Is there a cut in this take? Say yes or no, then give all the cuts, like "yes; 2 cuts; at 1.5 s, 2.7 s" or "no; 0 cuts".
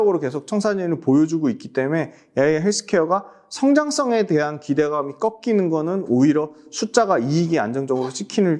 no; 0 cuts